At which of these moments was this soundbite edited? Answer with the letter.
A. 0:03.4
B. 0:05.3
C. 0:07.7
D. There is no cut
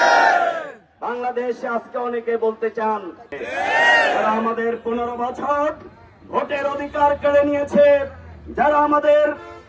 A